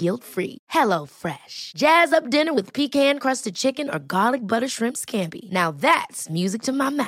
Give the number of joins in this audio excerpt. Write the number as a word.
zero